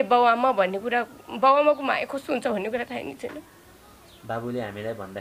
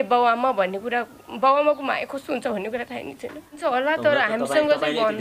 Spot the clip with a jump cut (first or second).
second